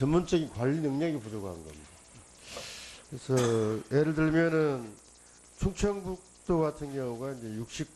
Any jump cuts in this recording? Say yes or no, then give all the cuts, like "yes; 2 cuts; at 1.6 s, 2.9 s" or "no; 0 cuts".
yes; 1 cut; at 5.5 s